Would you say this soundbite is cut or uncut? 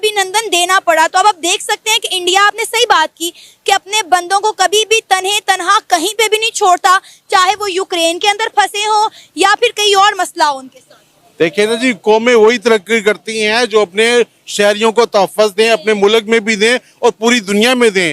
uncut